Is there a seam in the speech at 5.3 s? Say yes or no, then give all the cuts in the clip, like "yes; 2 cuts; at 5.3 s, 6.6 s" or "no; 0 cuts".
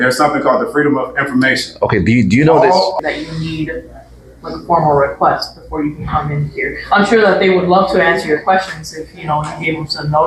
no; 1 cut; at 2.9 s